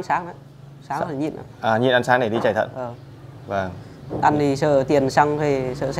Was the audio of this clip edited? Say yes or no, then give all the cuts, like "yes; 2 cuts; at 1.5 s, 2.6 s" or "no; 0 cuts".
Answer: no; 0 cuts